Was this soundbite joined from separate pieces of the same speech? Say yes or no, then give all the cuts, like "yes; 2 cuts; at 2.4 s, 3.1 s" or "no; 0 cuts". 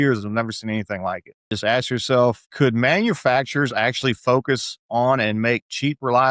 yes; 1 cut; at 1.5 s